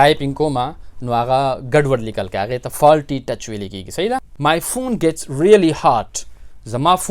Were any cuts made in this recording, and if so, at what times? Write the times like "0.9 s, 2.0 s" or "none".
4.3 s